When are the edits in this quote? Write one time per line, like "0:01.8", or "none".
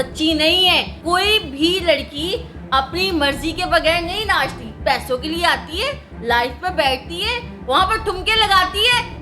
0:00.9